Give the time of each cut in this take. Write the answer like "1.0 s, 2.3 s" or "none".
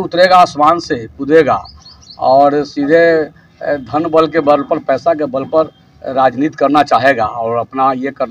none